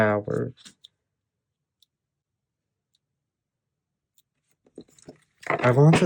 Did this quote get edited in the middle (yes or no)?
no